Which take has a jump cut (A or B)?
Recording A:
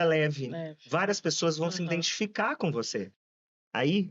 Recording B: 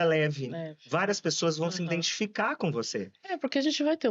A